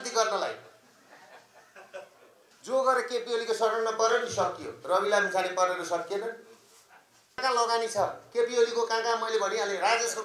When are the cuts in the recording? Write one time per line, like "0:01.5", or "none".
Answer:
0:02.4
0:07.4